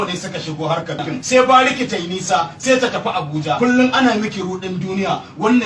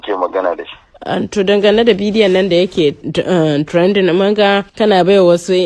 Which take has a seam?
first; 2 cuts; at 1.1 s, 3.6 s

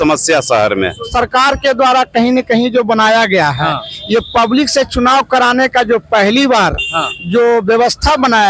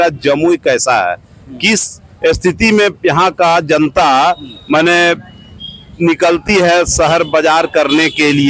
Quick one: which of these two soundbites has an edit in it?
first; 1 cut; at 1.1 s

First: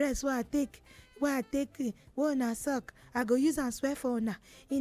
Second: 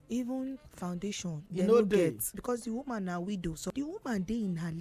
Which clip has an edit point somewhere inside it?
second; 3 cuts; at 1.4 s, 2.3 s, 3.7 s

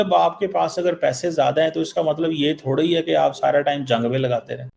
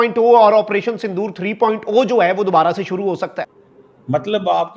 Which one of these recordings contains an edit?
second; 1 cut; at 3.4 s

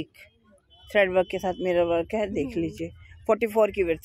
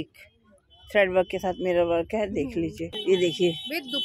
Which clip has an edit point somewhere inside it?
second; 1 cut; at 2.9 s

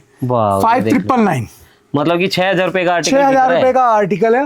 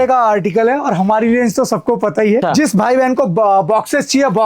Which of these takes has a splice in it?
second; 1 cut; at 2.4 s

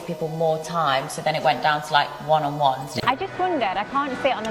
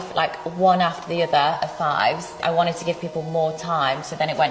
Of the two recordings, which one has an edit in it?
first; 1 cut; at 2.9 s

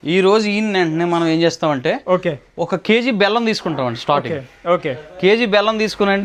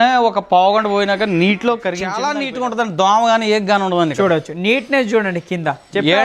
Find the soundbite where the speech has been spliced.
second; 1 cut; at 2.1 s

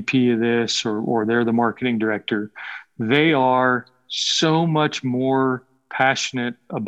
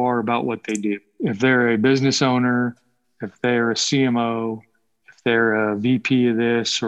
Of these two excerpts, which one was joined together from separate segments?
second; 1 cut; at 1.1 s

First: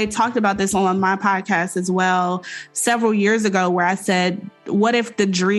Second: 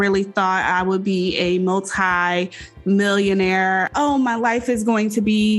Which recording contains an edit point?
second; 1 cut; at 3.9 s

